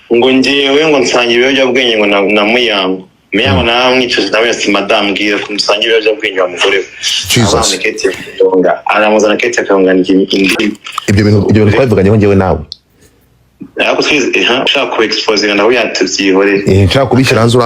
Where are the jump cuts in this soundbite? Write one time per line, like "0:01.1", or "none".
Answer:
none